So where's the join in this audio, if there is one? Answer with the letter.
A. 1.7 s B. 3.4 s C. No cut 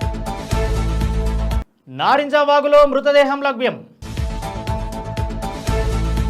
A